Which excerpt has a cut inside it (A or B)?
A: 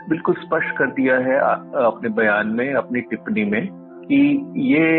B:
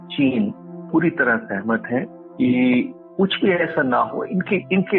B